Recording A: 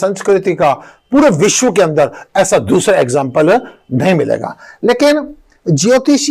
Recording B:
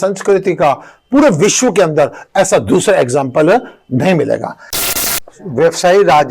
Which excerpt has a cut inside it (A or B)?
B